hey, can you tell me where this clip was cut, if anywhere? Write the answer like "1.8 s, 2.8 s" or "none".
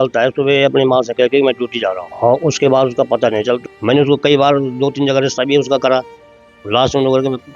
2.1 s, 3.6 s